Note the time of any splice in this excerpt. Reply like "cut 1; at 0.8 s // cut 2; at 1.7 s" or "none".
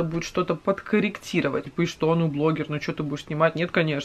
cut 1; at 1.6 s